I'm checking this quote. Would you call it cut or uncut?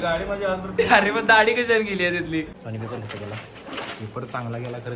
cut